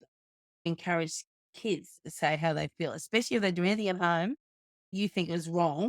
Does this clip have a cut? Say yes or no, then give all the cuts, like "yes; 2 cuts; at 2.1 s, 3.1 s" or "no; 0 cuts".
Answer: yes; 2 cuts; at 0.7 s, 4.9 s